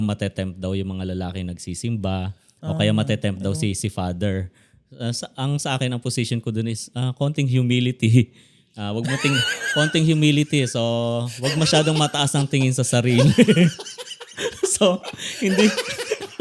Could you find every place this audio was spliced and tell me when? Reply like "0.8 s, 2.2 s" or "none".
none